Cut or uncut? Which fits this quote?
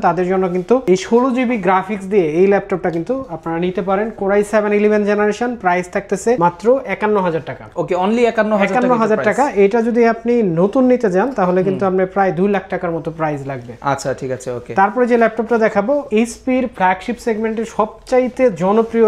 uncut